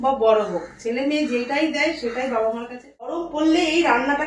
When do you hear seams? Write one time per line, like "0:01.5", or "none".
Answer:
0:03.2